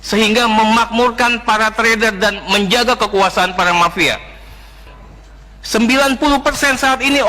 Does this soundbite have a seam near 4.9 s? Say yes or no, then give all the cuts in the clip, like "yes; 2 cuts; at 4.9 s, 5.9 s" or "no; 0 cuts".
yes; 1 cut; at 4.9 s